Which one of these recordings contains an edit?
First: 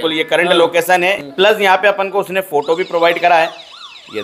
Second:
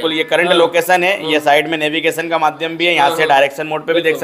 first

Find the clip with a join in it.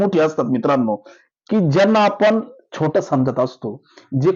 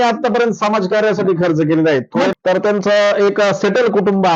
second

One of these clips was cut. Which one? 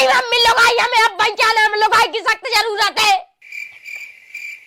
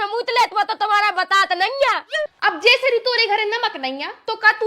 second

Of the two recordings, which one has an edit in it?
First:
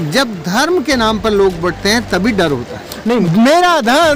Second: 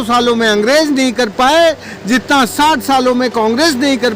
first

